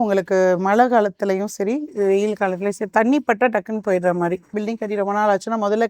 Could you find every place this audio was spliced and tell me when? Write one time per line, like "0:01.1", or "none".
0:04.6